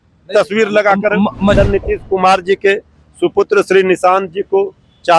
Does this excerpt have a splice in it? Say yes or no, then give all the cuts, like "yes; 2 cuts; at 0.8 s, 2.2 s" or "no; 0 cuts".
yes; 1 cut; at 1.6 s